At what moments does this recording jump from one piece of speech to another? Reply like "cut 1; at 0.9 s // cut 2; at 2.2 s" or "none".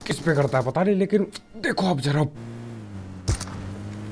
cut 1; at 3.0 s